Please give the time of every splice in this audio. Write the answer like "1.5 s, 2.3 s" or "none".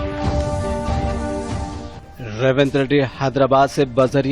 1.7 s